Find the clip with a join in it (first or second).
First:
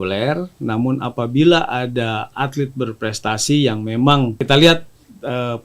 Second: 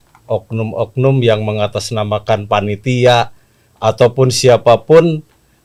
first